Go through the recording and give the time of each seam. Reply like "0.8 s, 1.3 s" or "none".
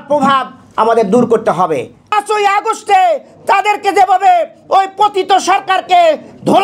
2.1 s